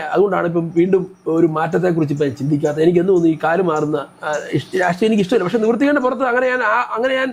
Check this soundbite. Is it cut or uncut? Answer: uncut